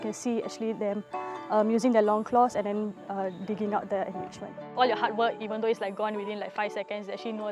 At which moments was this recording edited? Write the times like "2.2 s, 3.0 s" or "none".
4.7 s

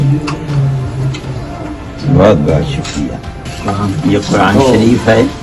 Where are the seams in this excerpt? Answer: 3.5 s

